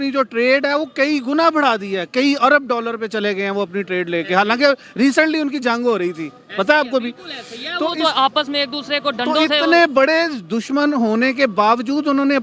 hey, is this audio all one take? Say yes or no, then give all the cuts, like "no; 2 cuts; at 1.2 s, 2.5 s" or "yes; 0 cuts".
yes; 0 cuts